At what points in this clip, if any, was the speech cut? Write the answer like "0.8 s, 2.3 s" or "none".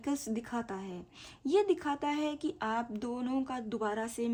none